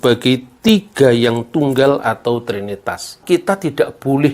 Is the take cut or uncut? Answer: cut